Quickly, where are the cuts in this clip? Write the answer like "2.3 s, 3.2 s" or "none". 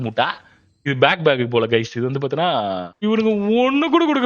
2.9 s